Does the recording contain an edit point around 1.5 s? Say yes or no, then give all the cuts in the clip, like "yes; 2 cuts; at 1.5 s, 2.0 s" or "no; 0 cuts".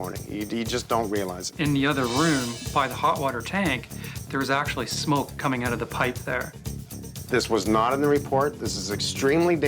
yes; 2 cuts; at 1.5 s, 6.9 s